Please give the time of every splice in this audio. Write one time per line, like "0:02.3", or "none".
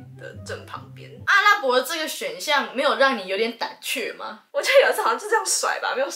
0:01.2
0:04.3